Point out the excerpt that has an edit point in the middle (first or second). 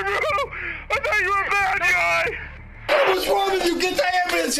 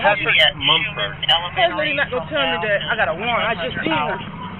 first